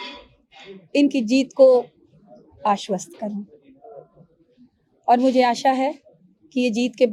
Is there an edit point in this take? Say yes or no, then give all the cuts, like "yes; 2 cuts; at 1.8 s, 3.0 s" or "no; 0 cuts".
no; 0 cuts